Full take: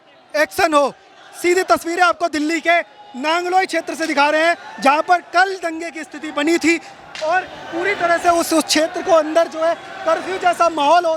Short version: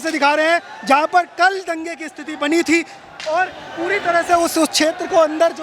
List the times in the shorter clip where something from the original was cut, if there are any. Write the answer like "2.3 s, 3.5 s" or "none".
none